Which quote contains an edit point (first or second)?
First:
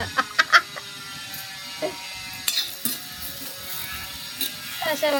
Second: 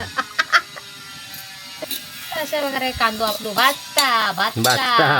second